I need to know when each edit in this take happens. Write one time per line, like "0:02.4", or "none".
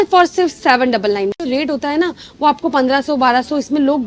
0:01.4